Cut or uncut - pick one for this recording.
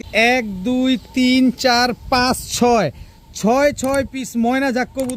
uncut